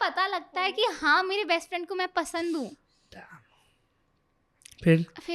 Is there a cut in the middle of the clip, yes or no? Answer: no